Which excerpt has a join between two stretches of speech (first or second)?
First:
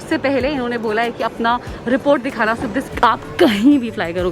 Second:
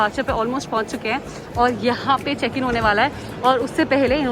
first